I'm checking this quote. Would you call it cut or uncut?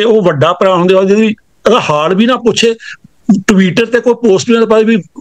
uncut